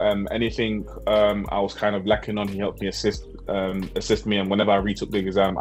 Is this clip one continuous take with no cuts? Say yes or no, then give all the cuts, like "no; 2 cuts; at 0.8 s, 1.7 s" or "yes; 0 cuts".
yes; 0 cuts